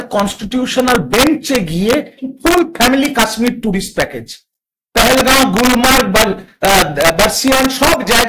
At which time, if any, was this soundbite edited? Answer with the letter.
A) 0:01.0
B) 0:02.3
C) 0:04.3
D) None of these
B